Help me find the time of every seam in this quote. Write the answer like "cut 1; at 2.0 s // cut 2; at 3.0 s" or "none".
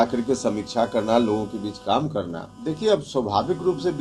cut 1; at 2.8 s